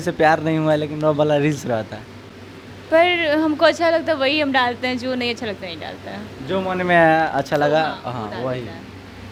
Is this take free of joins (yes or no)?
yes